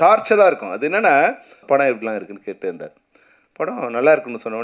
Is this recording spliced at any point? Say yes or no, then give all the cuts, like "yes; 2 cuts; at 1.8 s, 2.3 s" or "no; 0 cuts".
yes; 1 cut; at 1.6 s